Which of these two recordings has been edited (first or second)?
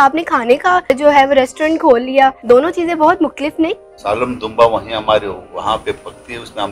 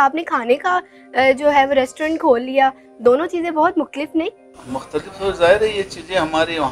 first